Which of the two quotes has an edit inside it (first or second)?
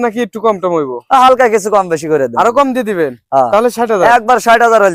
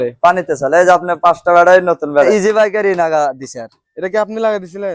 second